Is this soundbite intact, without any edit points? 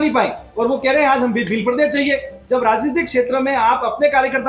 yes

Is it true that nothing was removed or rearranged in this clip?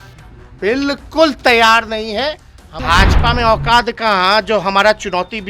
no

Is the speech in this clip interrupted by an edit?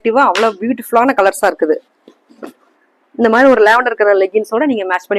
no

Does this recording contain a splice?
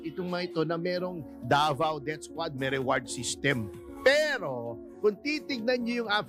no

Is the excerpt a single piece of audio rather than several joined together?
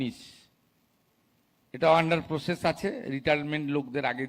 yes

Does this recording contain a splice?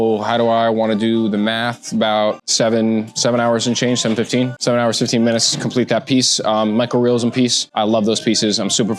yes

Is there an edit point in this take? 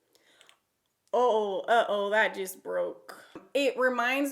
yes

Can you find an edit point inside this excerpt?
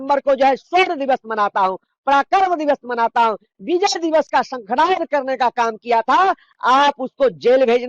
no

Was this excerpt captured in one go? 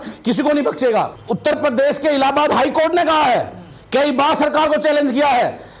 yes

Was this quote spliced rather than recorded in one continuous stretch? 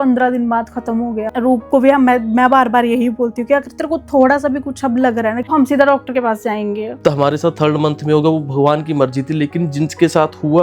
yes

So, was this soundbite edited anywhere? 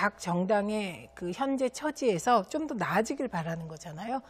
yes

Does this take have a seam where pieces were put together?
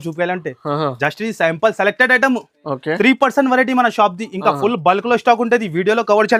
no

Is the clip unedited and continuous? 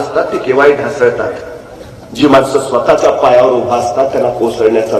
yes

